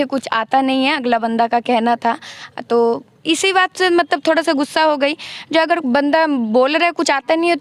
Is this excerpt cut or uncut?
uncut